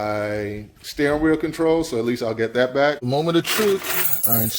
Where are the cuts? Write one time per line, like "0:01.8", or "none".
0:03.0